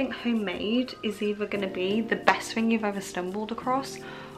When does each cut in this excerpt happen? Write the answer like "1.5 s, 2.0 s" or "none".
none